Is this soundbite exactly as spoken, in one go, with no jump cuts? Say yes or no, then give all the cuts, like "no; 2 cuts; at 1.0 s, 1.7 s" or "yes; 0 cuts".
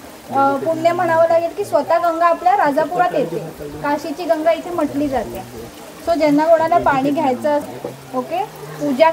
yes; 0 cuts